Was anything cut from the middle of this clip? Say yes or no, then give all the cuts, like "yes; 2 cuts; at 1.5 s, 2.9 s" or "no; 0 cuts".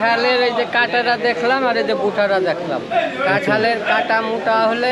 no; 0 cuts